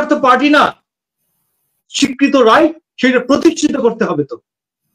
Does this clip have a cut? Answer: yes; 1 cut; at 1.9 s

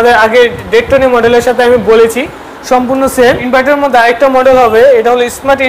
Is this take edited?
yes; 1 cut; at 3.4 s

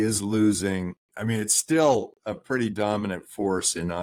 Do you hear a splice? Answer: no; 0 cuts

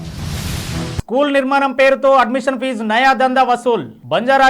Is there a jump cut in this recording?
yes; 1 cut; at 1.0 s

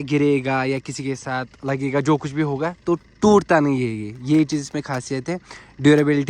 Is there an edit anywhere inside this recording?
no; 0 cuts

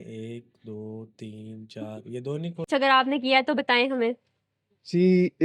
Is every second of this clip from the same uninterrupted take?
no; 1 cut; at 2.7 s

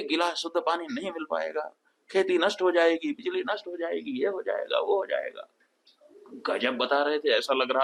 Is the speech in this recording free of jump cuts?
yes; 0 cuts

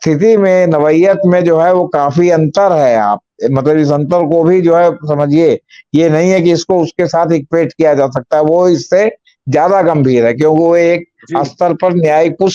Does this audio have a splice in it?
no; 0 cuts

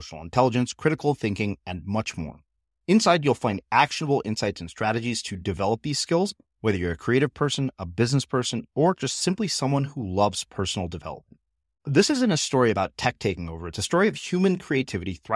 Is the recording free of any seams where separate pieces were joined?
yes; 0 cuts

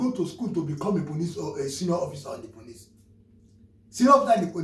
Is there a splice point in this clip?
no; 0 cuts

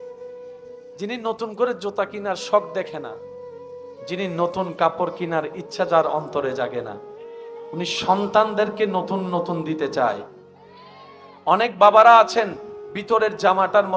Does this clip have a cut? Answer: yes; 1 cut; at 1.0 s

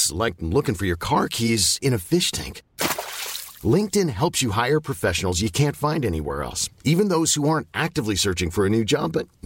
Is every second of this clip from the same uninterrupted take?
yes; 0 cuts

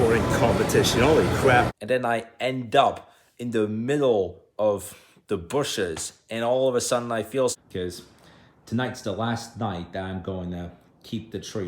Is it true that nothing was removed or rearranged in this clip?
no; 2 cuts; at 1.7 s, 7.5 s

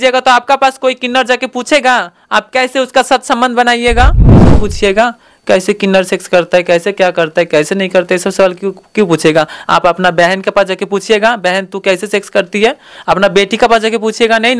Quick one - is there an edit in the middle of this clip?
yes; 1 cut; at 4.4 s

